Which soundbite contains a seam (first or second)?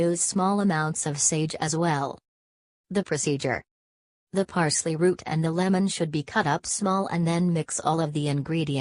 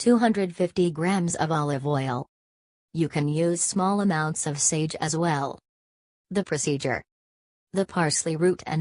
second